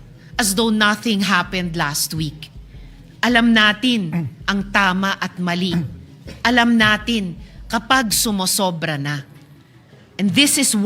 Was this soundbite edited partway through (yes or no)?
no